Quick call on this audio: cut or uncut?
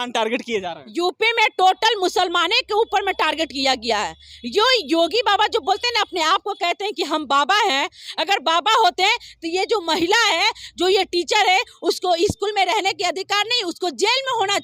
uncut